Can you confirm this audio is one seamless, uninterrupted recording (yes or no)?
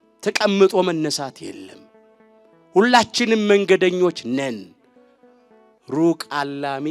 yes